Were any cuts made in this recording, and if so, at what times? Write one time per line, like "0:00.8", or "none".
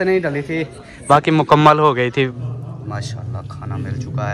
0:02.3

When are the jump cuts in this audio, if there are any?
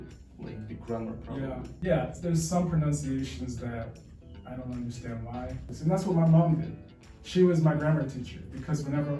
0:01.7
0:05.7

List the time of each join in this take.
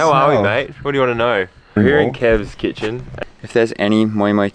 0:01.8
0:03.2

